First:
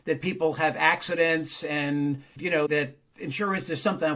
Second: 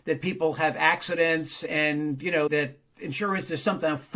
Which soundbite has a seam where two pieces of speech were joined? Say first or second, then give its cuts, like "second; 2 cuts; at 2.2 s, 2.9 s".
second; 1 cut; at 2.0 s